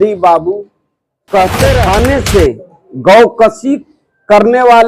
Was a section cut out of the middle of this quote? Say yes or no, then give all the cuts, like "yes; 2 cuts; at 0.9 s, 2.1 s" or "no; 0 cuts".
yes; 1 cut; at 1.9 s